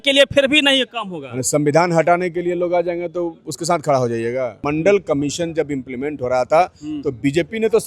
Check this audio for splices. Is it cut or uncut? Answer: cut